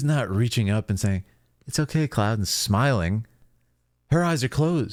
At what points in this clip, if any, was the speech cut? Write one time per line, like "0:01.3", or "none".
none